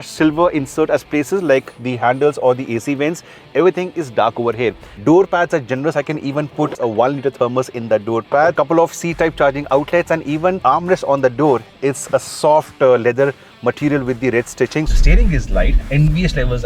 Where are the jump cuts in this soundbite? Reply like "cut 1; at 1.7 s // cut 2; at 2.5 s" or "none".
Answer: cut 1; at 4.9 s // cut 2; at 6.8 s // cut 3; at 8.5 s // cut 4; at 10.6 s // cut 5; at 14.9 s